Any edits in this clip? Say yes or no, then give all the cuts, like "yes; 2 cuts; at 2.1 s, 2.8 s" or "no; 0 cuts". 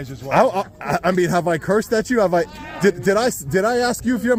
no; 0 cuts